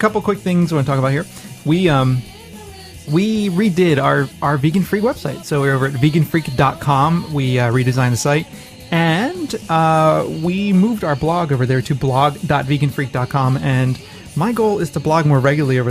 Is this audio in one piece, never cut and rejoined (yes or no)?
no